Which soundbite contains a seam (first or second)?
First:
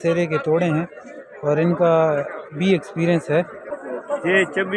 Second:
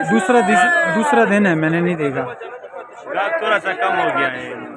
first